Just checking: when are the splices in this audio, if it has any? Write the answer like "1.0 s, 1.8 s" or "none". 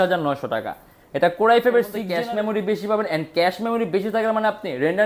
2.0 s